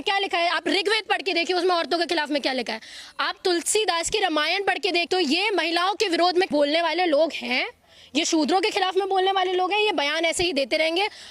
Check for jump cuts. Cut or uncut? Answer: uncut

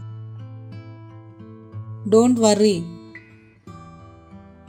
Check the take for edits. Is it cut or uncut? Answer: uncut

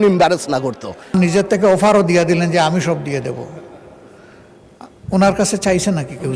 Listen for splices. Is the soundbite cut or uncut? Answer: cut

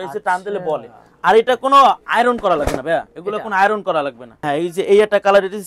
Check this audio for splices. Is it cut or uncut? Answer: cut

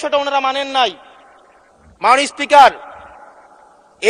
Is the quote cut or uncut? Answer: uncut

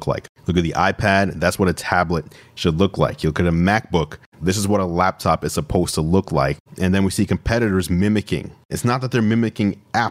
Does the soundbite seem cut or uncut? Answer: cut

